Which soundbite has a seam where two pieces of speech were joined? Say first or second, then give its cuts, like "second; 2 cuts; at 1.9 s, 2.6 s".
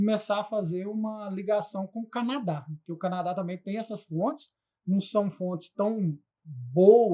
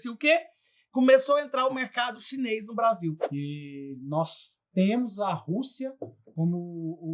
second; 1 cut; at 3.2 s